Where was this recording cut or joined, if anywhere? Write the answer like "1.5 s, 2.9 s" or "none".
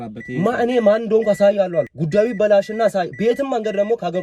2.0 s